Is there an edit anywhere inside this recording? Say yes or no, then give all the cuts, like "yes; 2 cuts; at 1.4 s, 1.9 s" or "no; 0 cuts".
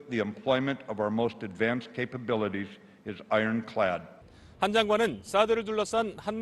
yes; 1 cut; at 2.0 s